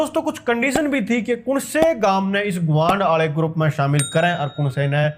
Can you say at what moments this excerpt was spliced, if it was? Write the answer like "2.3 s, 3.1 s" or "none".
none